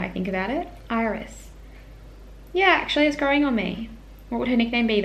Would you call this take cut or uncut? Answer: uncut